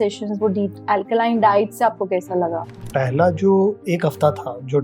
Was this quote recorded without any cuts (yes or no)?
no